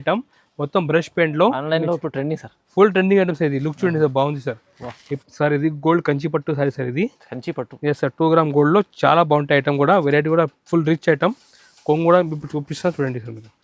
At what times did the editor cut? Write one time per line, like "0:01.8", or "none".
0:05.1